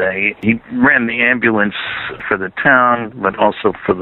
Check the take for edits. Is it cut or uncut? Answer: uncut